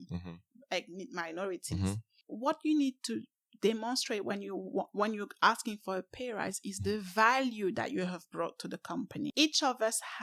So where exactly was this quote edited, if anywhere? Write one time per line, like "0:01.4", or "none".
0:02.2
0:09.3